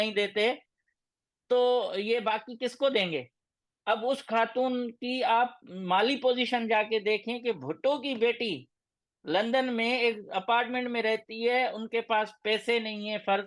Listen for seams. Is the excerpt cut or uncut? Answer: uncut